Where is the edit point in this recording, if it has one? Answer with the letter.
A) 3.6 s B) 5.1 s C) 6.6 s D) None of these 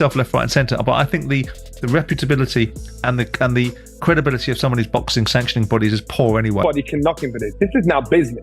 C